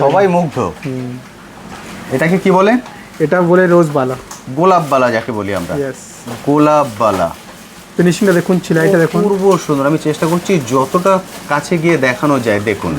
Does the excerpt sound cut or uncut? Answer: uncut